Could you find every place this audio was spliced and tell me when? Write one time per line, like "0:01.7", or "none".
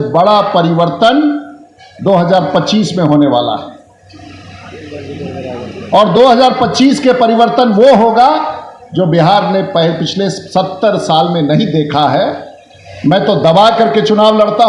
none